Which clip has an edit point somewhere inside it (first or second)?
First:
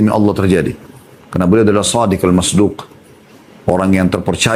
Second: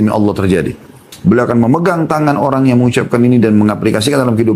second